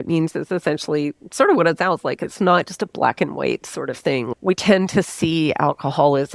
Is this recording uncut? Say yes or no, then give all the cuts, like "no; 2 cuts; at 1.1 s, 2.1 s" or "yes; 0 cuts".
yes; 0 cuts